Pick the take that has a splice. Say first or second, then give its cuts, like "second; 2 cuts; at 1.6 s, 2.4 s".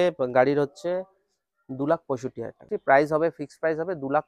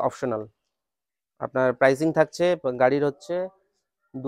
first; 1 cut; at 2.7 s